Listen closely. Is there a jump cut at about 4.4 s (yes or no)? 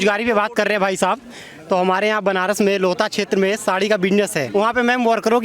yes